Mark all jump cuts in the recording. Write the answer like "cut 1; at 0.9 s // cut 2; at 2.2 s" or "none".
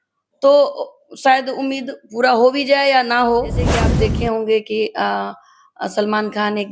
cut 1; at 3.9 s